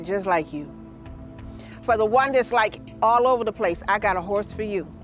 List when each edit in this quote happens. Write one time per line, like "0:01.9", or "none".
none

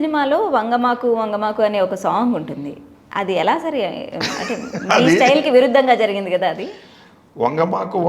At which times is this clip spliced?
none

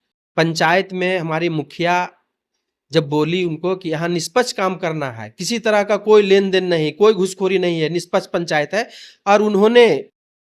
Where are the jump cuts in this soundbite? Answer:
none

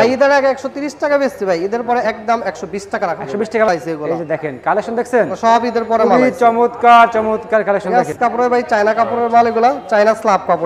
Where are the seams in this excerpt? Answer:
0:03.7
0:08.1

